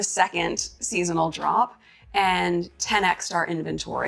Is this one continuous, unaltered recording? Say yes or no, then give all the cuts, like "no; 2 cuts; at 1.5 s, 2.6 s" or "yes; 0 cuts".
yes; 0 cuts